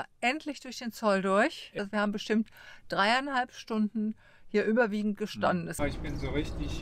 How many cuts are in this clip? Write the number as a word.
two